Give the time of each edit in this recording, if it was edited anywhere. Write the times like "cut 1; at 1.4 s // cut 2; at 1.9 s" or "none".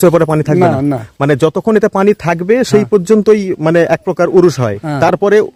none